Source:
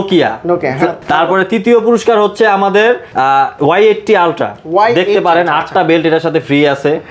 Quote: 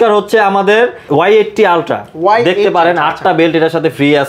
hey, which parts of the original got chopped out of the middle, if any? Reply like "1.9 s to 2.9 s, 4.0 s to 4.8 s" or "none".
3.1 s to 3.5 s